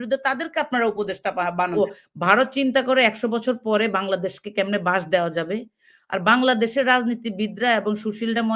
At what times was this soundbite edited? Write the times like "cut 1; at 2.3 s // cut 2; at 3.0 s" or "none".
cut 1; at 1.7 s